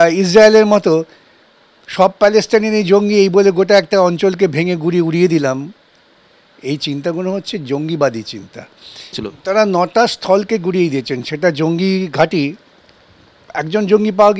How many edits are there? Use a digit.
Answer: 1